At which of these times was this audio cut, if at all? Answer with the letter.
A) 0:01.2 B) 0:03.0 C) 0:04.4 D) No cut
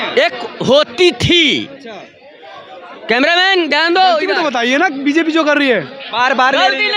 C